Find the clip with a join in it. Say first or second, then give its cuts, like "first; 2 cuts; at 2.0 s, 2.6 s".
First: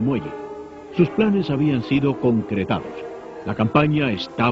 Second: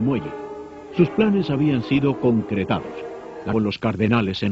first; 1 cut; at 3.4 s